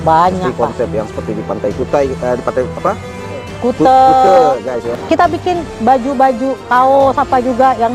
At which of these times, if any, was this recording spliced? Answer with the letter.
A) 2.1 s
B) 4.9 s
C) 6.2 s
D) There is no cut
B